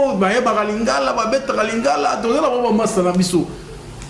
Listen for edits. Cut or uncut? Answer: uncut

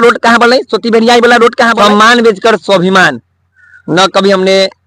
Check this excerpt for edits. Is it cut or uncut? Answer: cut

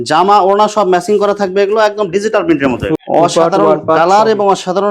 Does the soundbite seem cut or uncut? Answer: cut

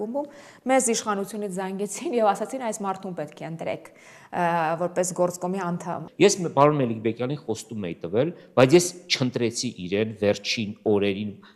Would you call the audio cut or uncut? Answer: cut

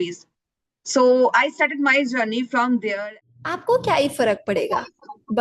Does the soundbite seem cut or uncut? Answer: cut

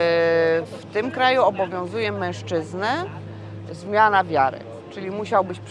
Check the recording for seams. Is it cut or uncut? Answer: uncut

